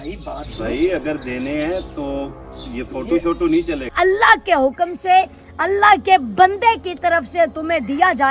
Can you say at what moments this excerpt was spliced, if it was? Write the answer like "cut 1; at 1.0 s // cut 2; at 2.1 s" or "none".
cut 1; at 3.9 s